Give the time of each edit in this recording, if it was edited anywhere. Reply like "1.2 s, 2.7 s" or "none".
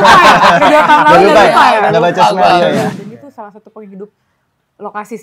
2.9 s